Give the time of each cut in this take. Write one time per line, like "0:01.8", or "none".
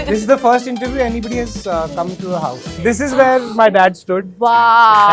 none

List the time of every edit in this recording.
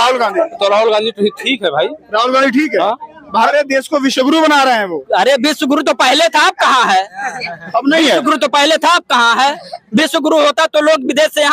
0:03.4

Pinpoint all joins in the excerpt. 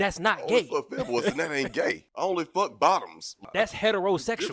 0:02.3
0:03.4

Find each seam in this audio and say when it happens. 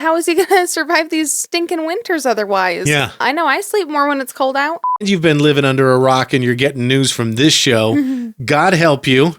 0:03.2
0:05.1

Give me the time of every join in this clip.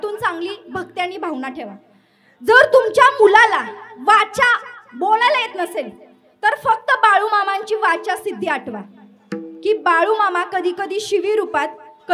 none

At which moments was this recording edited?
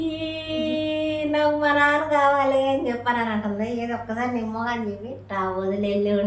0:05.1

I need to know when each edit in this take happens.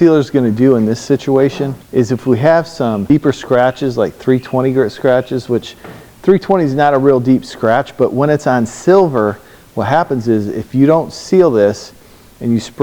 0:01.7
0:03.0

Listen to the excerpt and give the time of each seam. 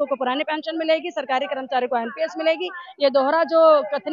none

